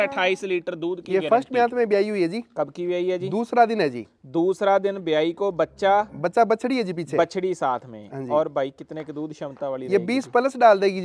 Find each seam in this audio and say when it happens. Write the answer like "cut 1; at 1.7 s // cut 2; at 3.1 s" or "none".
cut 1; at 1.0 s